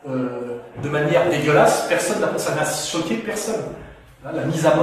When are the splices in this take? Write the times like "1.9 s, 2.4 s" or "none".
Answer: none